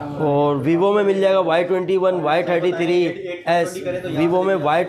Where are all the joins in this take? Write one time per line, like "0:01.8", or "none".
none